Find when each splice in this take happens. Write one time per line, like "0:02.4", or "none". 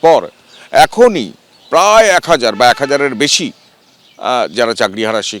none